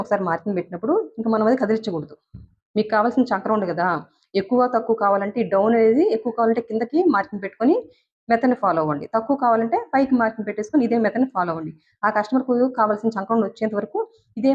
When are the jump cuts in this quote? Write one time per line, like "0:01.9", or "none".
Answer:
none